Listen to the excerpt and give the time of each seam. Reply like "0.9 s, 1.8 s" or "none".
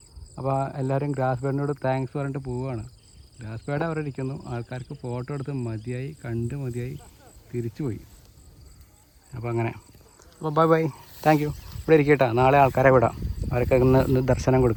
none